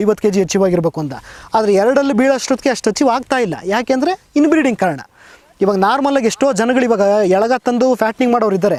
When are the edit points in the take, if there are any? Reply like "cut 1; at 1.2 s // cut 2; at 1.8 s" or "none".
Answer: none